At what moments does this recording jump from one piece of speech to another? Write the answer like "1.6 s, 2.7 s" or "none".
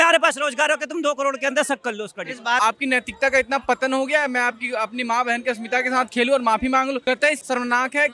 2.6 s, 7.2 s